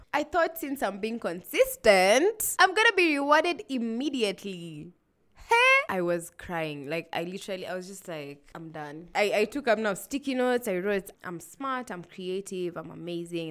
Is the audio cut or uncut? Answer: cut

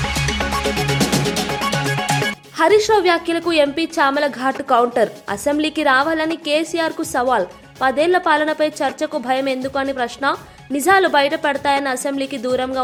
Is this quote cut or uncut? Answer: uncut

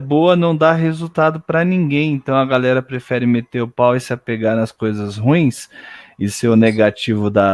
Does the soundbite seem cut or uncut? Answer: uncut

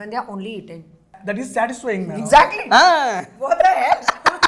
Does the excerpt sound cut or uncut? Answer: cut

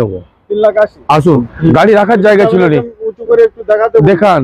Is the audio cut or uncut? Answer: cut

